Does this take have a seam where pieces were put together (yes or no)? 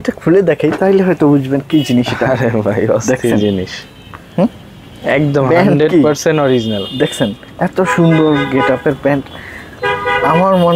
no